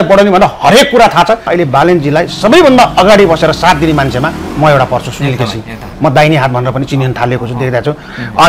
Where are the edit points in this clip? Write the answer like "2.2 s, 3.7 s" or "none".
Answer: 1.5 s